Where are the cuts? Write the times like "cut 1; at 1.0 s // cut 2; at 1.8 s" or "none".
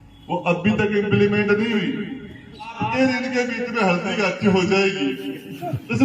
cut 1; at 2.8 s